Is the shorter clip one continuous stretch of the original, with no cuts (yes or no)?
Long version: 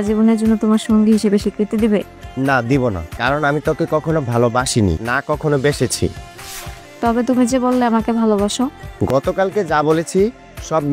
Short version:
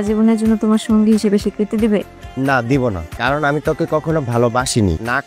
yes